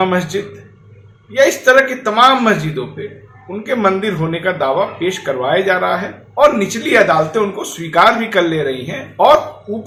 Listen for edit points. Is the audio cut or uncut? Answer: uncut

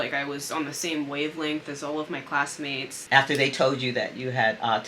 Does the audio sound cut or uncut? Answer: cut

